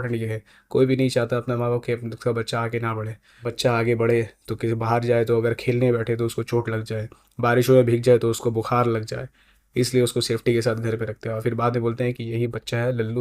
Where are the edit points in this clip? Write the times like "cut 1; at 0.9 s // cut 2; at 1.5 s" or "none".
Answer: cut 1; at 3.5 s